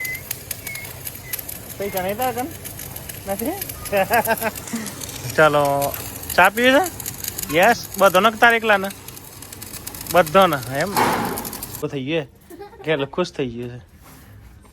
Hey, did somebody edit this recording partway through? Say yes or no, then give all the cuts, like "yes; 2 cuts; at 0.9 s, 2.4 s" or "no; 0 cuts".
yes; 1 cut; at 11.8 s